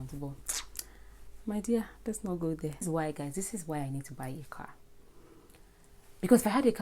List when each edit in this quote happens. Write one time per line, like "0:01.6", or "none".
0:02.9